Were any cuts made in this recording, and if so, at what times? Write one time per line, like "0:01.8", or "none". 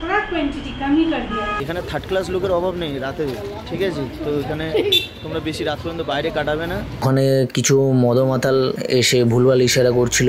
0:01.6
0:06.8